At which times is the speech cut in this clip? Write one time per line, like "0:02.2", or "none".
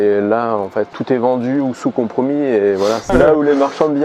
0:03.0